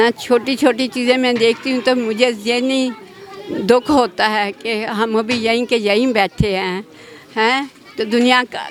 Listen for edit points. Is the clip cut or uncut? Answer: uncut